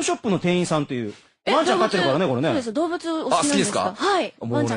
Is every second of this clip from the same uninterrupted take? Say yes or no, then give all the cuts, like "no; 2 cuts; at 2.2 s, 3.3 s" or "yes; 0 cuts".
no; 1 cut; at 2.4 s